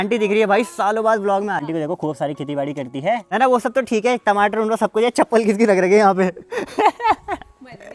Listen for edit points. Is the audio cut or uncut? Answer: cut